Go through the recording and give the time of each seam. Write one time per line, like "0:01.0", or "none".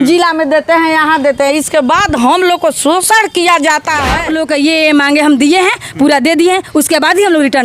0:04.2

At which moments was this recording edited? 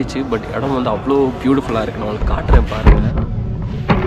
none

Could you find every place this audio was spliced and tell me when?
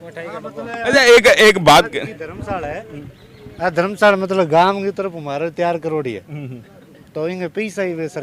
none

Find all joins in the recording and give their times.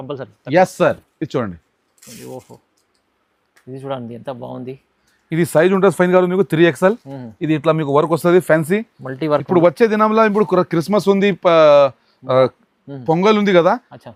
none

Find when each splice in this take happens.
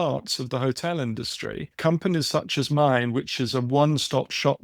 0:01.7

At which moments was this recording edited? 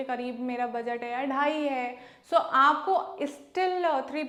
none

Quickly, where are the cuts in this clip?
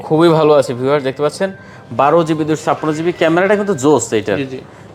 none

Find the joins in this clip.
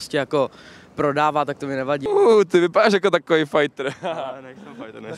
0:02.0

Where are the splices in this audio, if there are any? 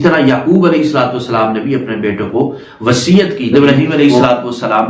0:03.5

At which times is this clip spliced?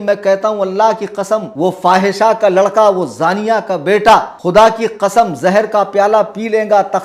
0:01.5
0:04.4

